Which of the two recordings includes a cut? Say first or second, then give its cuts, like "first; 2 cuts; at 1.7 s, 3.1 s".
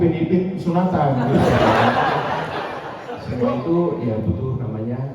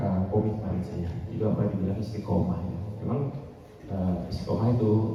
first; 1 cut; at 3.3 s